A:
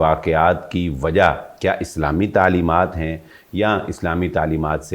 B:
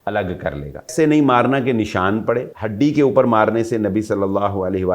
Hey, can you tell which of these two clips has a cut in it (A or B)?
B